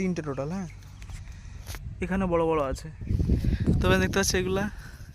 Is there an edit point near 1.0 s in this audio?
no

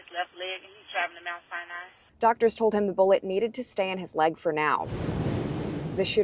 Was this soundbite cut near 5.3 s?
no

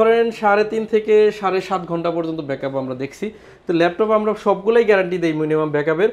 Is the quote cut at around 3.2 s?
no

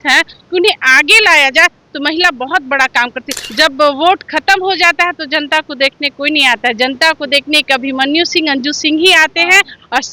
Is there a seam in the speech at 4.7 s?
no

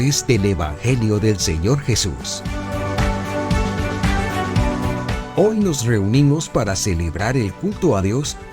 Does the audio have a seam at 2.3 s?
yes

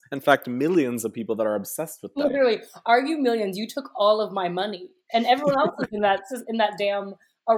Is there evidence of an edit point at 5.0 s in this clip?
no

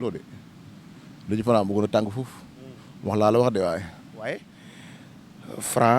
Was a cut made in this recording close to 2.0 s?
no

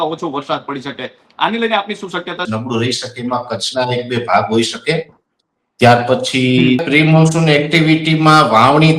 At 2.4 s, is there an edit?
yes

